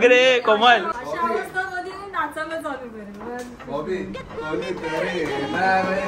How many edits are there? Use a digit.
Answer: 2